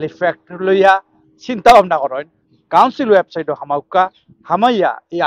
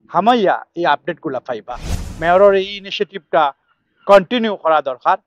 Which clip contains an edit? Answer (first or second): second